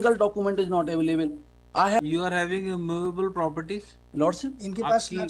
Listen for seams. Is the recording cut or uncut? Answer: cut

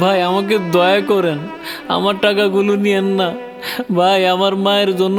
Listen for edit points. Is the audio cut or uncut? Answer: uncut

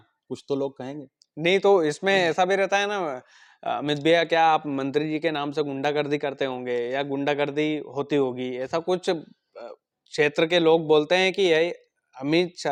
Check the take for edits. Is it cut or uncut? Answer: uncut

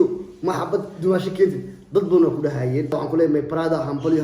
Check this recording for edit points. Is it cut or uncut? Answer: cut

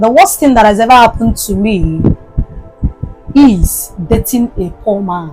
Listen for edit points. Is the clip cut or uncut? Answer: uncut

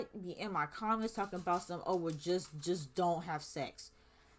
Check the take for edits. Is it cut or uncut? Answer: uncut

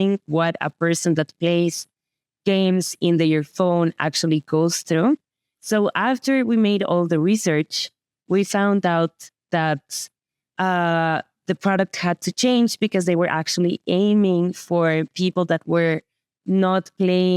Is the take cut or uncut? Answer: uncut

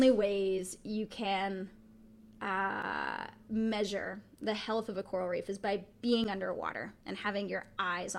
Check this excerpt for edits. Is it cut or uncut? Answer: uncut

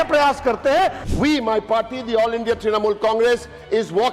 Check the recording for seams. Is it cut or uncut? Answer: cut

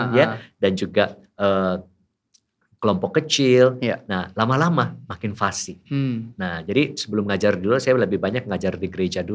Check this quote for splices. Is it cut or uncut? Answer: uncut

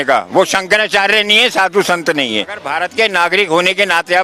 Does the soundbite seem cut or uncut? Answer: cut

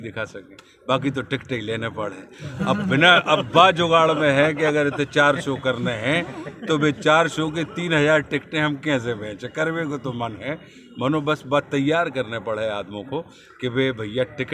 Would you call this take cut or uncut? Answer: uncut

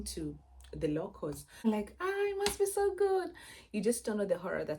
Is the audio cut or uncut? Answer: cut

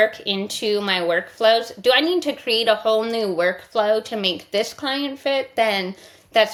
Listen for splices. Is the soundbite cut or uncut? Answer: uncut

